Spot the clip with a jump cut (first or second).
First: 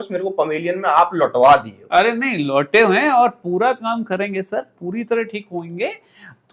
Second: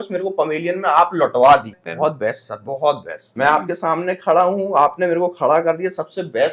second